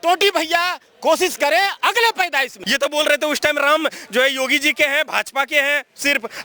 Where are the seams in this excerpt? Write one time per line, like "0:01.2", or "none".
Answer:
0:02.5